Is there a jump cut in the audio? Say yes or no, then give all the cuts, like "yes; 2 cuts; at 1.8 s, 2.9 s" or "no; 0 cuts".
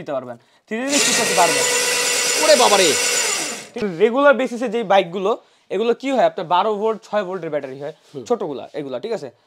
yes; 1 cut; at 3.8 s